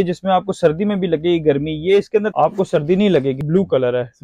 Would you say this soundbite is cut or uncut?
cut